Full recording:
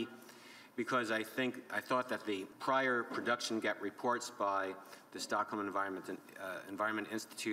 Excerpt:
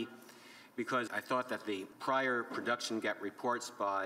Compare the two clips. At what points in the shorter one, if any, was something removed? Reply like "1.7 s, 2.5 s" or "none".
1.1 s